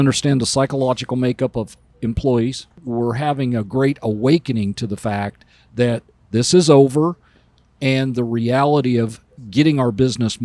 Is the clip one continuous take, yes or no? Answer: no